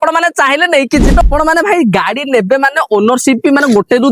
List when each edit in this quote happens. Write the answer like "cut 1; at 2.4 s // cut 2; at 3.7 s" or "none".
cut 1; at 1.2 s